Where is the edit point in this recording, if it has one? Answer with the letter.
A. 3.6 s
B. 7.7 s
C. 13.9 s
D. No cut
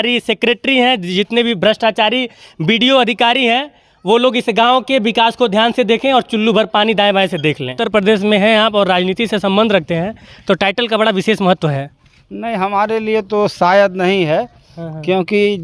B